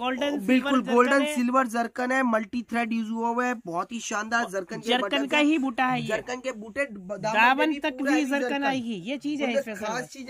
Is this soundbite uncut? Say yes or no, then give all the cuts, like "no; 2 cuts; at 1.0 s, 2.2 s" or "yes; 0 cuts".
yes; 0 cuts